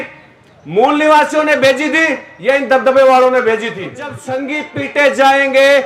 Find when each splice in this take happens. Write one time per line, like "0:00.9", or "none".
0:04.2